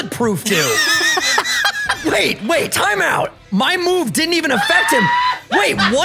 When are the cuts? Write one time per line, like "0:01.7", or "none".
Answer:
none